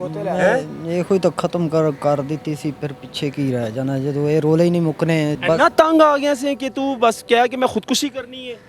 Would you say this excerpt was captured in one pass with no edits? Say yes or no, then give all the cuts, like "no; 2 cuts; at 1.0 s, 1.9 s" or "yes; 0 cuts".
no; 1 cut; at 5.3 s